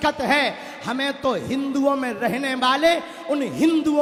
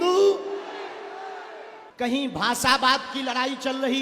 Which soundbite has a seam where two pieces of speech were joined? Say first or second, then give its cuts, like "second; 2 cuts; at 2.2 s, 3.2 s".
second; 1 cut; at 1.8 s